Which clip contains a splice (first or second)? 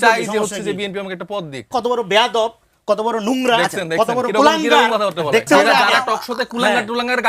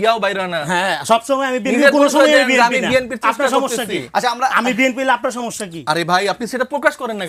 first